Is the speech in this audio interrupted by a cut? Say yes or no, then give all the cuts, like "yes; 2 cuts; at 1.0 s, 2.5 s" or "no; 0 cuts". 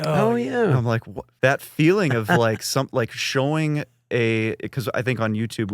yes; 1 cut; at 1.2 s